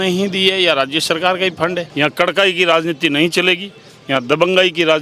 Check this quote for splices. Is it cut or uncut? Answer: cut